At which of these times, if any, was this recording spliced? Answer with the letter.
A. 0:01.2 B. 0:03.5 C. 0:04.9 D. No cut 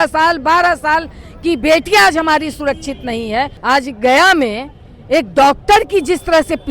B